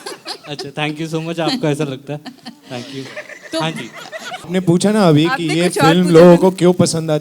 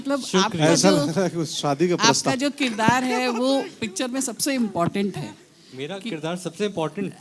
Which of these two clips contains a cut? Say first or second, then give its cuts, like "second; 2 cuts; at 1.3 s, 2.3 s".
first; 1 cut; at 4.5 s